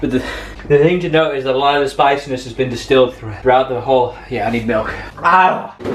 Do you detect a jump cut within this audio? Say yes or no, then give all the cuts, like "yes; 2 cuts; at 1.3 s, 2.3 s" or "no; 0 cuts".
no; 0 cuts